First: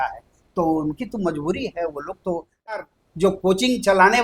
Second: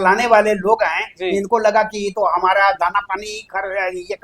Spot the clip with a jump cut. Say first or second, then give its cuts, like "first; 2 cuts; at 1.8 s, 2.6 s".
first; 1 cut; at 2.8 s